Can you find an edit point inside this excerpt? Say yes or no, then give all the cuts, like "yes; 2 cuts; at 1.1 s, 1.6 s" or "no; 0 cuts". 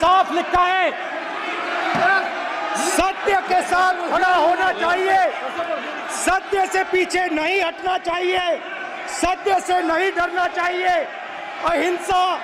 no; 0 cuts